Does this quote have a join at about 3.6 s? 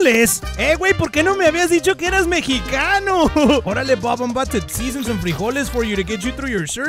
yes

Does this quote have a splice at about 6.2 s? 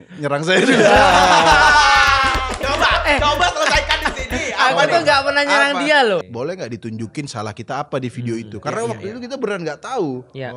yes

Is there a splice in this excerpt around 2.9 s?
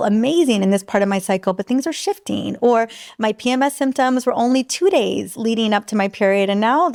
no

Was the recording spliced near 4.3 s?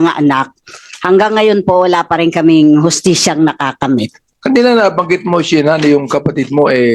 yes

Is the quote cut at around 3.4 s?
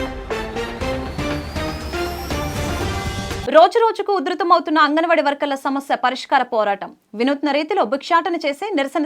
yes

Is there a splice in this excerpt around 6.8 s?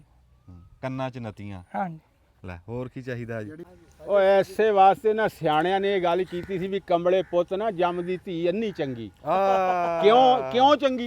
no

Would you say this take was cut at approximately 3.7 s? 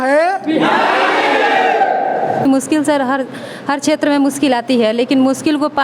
no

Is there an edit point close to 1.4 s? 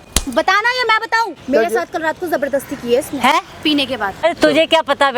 yes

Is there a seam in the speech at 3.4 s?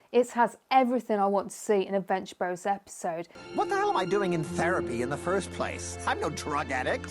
yes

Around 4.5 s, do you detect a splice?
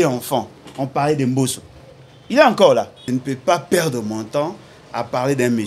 no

